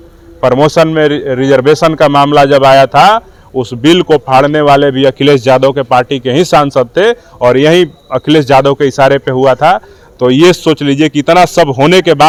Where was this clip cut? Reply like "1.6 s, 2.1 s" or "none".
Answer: none